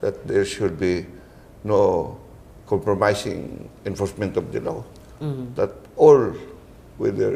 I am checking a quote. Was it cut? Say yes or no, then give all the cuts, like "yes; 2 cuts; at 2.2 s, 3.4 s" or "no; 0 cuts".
no; 0 cuts